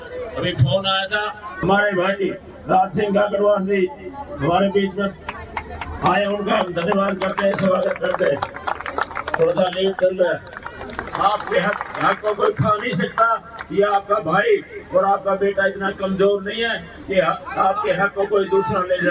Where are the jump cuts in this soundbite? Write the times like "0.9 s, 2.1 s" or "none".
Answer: 1.5 s, 11.1 s